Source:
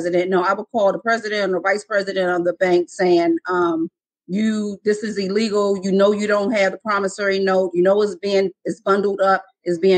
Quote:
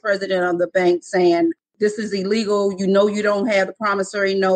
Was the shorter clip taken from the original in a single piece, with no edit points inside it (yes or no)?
no